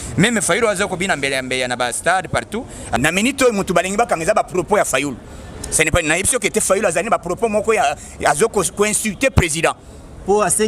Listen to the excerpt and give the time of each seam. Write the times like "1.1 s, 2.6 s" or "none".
3.0 s